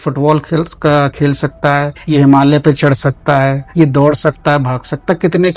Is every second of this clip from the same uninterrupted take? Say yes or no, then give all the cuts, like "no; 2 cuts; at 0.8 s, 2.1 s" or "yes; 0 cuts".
yes; 0 cuts